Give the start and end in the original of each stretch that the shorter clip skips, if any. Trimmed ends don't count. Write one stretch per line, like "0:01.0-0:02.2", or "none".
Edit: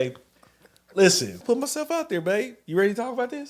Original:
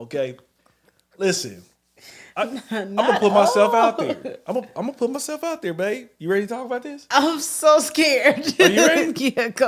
0:01.6-0:04.9